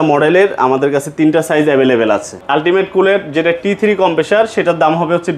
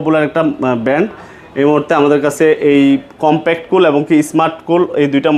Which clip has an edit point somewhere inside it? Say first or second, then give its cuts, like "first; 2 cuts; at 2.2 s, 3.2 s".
first; 1 cut; at 2.4 s